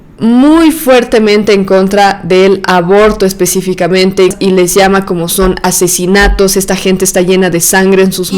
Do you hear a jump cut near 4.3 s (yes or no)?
yes